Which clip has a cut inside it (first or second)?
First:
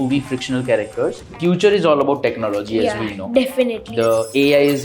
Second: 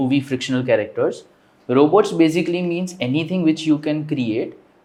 first